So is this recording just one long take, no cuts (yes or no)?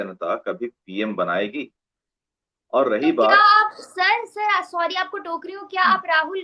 yes